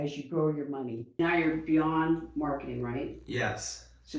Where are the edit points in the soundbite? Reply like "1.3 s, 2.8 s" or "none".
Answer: 1.1 s